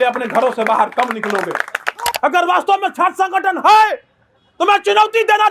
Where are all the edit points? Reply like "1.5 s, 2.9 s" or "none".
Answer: 2.1 s

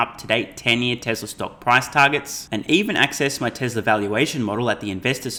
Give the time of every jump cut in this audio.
none

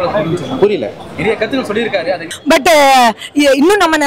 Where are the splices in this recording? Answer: 2.4 s

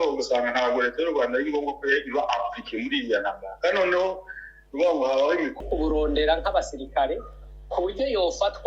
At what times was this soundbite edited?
5.6 s

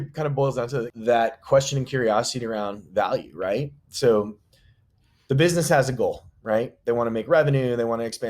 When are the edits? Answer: 0.9 s

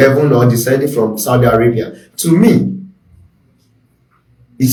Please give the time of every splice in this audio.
none

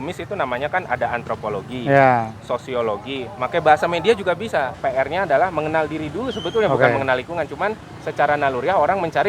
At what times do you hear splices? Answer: 4.8 s

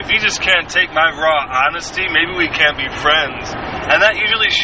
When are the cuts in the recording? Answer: none

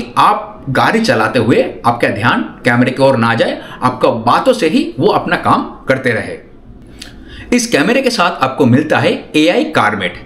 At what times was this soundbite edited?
none

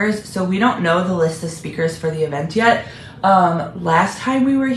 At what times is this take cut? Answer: none

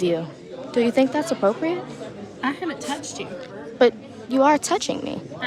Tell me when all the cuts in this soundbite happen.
none

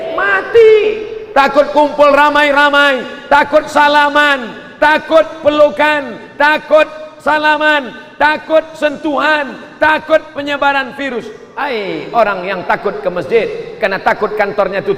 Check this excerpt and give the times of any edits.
11.4 s

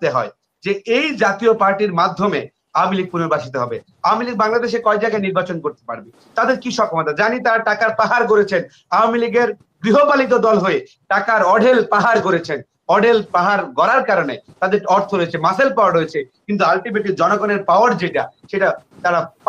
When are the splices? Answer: none

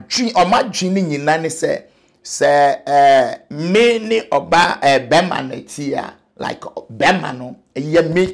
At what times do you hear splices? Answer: none

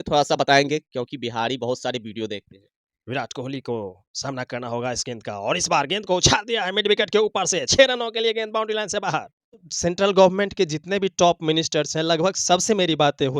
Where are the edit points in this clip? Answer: 9.7 s

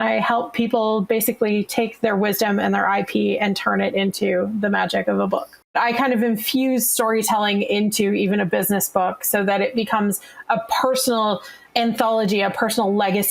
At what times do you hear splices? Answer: 5.7 s, 11.6 s

